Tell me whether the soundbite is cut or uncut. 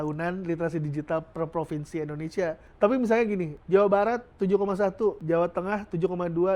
cut